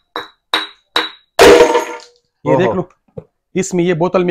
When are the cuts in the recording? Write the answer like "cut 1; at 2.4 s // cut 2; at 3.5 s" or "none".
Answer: none